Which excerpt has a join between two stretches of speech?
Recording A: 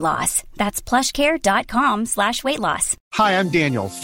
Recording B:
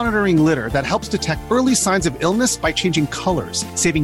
A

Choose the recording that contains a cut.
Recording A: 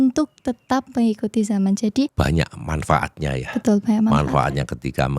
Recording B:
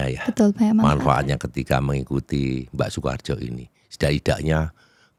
A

